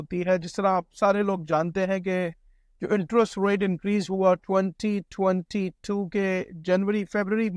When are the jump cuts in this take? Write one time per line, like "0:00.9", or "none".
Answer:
none

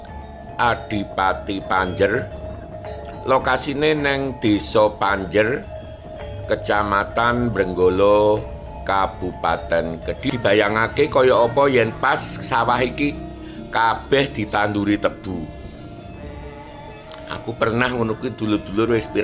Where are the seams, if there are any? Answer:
0:10.3

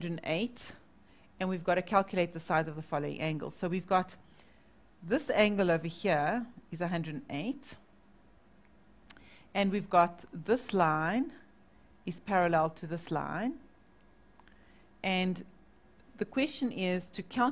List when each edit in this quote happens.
0:13.9

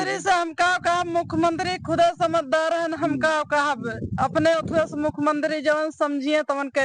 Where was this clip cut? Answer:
none

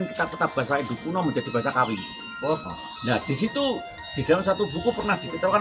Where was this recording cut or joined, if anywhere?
0:02.6

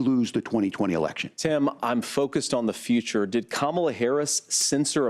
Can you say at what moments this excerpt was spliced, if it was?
0:01.3

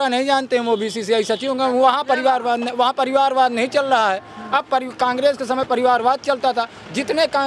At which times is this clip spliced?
none

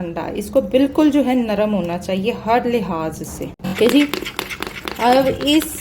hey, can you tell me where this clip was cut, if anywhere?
0:03.6

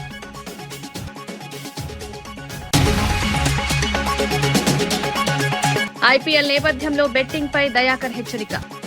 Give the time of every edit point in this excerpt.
0:00.9
0:02.6
0:05.8

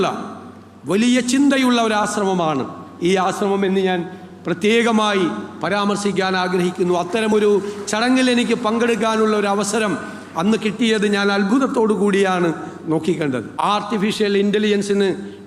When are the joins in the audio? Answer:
0:13.5

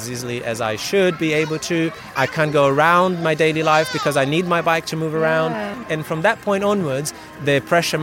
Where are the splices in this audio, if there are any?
0:02.1
0:05.8

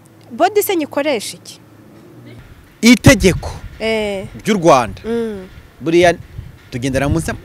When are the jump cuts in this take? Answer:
0:02.4

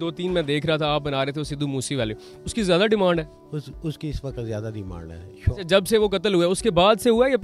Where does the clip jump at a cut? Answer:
none

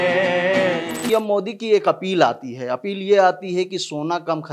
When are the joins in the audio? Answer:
0:01.0

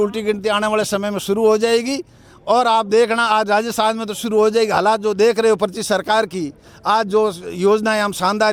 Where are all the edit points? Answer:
none

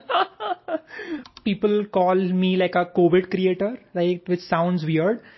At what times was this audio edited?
0:01.3

